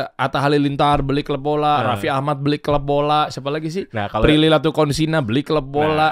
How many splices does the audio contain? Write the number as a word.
zero